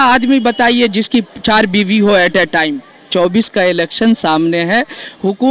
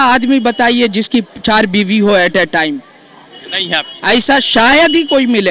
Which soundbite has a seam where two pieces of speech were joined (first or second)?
first